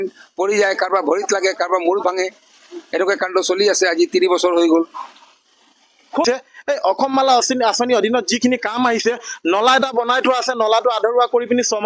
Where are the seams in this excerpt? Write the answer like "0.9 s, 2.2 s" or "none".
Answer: 6.2 s